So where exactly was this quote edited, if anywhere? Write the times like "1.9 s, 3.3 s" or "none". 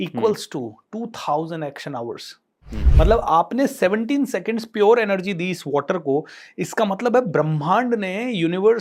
none

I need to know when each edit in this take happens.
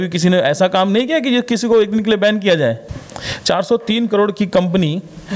2.9 s

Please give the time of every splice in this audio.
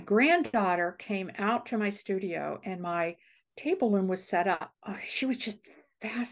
4.7 s

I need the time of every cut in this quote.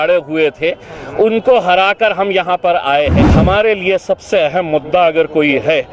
3.3 s

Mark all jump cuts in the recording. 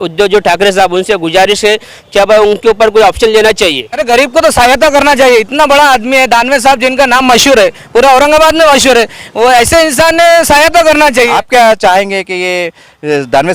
4.0 s, 11.4 s

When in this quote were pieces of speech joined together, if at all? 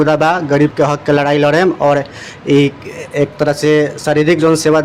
none

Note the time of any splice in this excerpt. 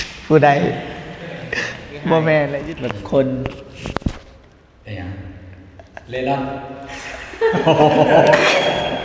2.6 s

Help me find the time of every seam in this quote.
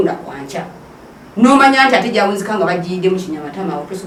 none

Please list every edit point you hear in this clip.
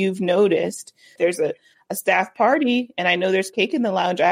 1.1 s

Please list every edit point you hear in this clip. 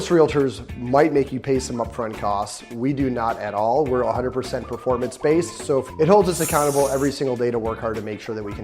5.9 s

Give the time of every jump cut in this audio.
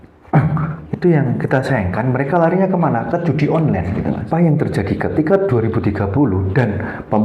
4.2 s

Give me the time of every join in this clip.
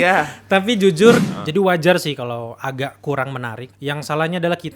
1.3 s, 3.6 s

